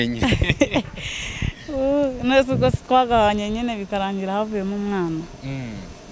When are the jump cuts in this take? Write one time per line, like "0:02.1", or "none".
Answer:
none